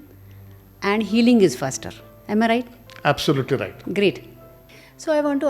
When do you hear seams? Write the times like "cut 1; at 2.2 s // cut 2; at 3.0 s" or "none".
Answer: none